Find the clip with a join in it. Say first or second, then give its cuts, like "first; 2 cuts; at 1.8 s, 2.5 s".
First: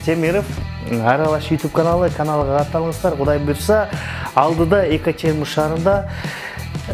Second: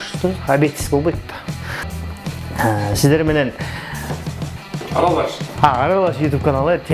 second; 1 cut; at 1.9 s